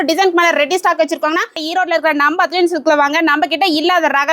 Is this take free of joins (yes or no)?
no